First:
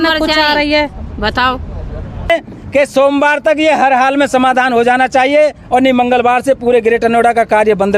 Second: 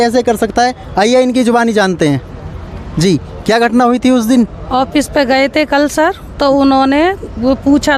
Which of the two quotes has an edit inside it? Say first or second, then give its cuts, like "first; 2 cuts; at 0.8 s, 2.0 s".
first; 1 cut; at 2.3 s